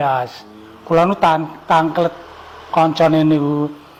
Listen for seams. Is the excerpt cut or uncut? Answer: uncut